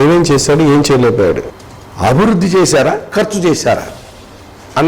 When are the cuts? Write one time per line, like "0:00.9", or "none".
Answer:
0:01.5